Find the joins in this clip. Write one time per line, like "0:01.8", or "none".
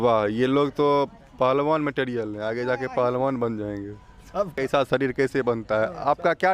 0:04.5